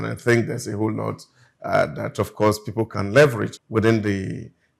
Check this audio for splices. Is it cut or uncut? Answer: cut